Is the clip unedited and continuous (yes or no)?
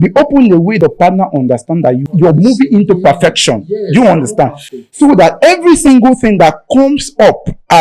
no